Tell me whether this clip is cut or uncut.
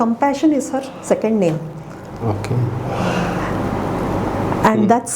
uncut